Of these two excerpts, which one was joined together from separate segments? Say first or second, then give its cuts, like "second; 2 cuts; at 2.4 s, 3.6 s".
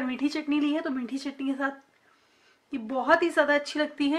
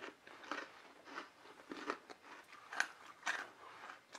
second; 1 cut; at 2.4 s